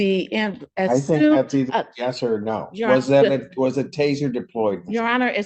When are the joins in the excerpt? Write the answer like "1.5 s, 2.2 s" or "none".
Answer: none